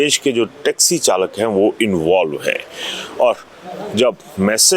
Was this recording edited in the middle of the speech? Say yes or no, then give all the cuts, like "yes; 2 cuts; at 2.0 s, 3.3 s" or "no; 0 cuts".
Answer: no; 0 cuts